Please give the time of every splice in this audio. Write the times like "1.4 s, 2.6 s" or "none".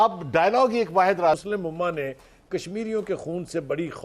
1.4 s